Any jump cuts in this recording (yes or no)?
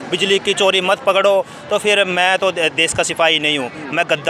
no